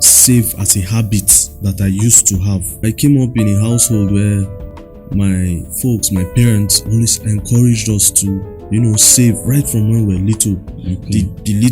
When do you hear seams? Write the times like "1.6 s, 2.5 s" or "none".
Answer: 2.8 s